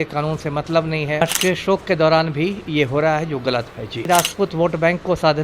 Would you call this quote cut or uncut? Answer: cut